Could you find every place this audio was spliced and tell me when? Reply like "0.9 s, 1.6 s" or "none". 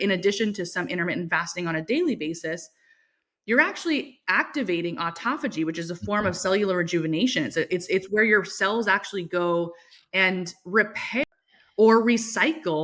11.2 s